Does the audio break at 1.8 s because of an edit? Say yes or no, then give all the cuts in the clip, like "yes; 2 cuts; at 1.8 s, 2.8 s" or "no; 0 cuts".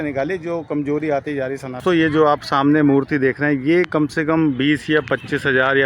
yes; 1 cut; at 1.8 s